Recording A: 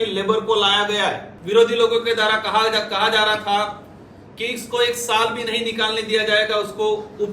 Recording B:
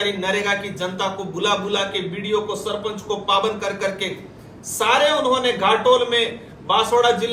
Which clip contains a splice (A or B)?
A